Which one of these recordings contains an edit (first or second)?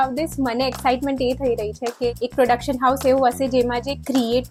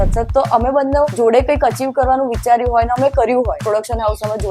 second